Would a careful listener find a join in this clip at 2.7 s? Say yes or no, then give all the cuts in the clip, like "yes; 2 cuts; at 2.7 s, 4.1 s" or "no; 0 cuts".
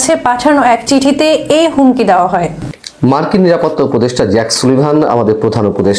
yes; 1 cut; at 2.7 s